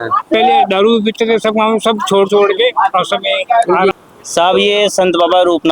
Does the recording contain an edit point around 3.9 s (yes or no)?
yes